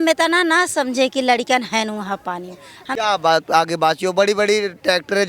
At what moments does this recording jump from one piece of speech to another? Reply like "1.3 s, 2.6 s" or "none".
2.8 s